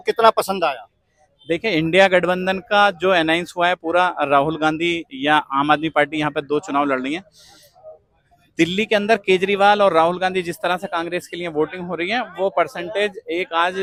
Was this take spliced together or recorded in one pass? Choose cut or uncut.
uncut